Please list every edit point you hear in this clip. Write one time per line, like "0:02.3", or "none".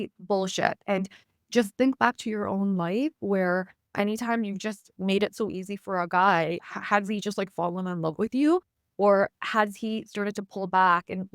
none